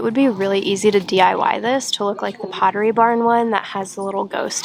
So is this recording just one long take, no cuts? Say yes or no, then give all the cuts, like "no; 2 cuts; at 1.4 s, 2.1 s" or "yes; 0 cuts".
yes; 0 cuts